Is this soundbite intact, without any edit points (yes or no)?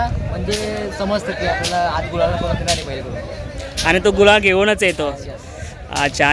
yes